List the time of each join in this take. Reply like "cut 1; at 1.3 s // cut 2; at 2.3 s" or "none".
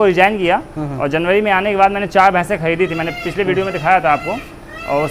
none